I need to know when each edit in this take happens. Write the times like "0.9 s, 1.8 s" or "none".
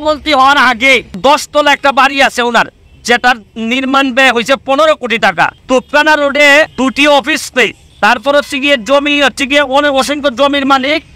1.2 s, 5.6 s, 6.7 s, 7.8 s